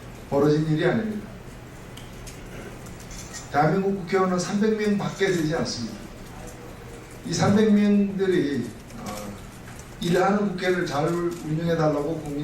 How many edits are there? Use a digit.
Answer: 1